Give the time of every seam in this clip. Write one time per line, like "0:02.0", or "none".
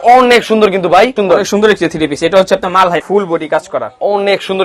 0:01.1
0:03.0